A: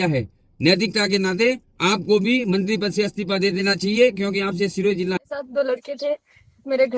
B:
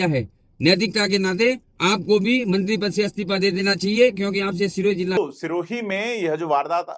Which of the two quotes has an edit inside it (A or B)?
A